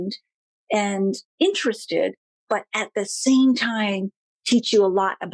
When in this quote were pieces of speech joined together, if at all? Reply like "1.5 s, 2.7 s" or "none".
none